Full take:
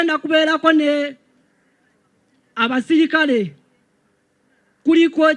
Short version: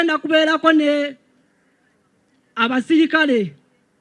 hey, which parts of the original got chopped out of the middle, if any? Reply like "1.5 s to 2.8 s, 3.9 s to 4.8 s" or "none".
none